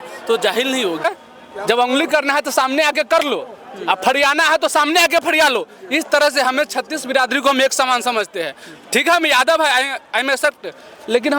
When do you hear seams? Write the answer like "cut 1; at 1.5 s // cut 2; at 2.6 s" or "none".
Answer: cut 1; at 1.0 s